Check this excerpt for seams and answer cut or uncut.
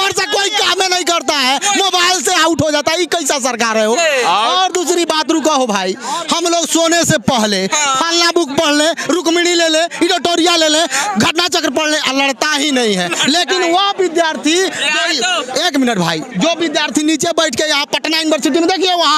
uncut